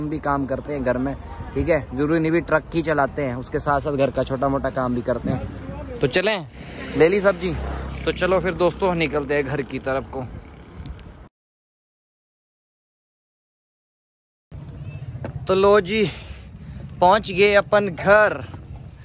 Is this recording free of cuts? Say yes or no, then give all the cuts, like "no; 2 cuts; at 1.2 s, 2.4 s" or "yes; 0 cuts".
yes; 0 cuts